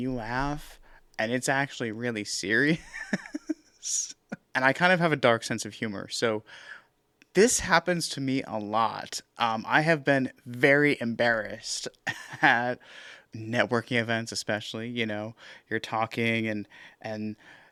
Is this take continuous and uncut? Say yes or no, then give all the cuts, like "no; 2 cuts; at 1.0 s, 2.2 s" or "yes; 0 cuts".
yes; 0 cuts